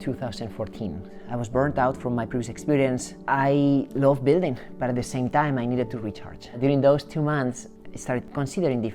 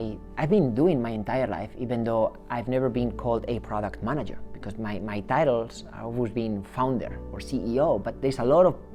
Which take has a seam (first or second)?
first